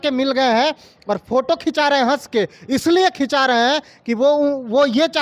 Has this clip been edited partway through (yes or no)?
no